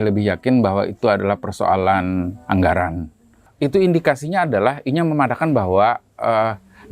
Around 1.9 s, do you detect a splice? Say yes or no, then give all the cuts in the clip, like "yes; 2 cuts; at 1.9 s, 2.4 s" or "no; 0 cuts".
no; 1 cut; at 3.5 s